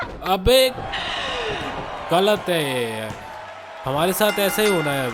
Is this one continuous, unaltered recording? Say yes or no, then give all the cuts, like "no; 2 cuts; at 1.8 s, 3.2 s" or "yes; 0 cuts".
yes; 0 cuts